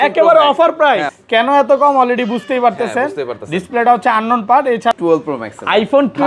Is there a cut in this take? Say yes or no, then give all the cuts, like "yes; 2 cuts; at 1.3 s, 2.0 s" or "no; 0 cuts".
yes; 2 cuts; at 1.1 s, 5.0 s